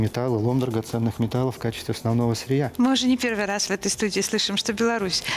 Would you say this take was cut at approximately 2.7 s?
yes; 1 cut; at 2.7 s

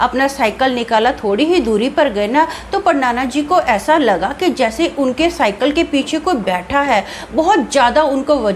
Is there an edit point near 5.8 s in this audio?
no; 0 cuts

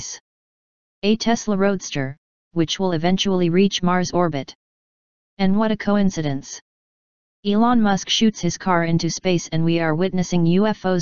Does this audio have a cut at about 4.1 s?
yes; 1 cut; at 4.1 s

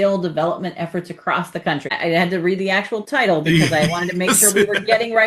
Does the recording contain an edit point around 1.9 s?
yes; 1 cut; at 1.9 s

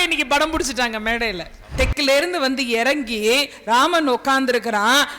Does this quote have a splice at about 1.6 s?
yes; 1 cut; at 1.6 s

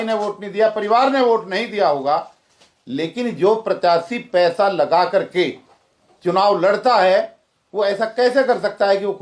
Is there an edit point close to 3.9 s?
no; 0 cuts

